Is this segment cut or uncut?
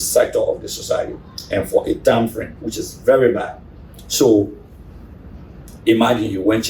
uncut